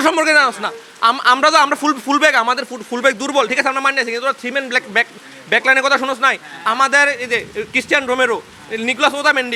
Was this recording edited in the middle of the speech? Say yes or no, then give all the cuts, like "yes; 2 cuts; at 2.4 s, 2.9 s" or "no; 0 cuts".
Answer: no; 0 cuts